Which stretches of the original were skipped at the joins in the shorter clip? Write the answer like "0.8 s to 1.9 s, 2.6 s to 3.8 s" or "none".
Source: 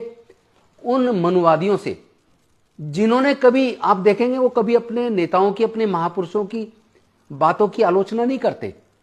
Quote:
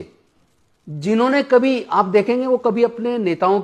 none